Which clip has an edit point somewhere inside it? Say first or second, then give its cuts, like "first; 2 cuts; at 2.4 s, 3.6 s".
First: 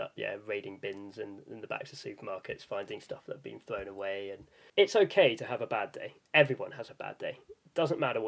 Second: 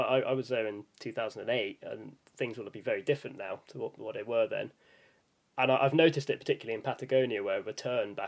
first; 1 cut; at 4.5 s